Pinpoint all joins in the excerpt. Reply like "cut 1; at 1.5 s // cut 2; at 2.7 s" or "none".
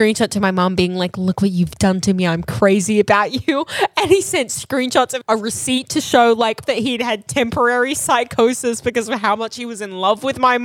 cut 1; at 5.2 s // cut 2; at 6.6 s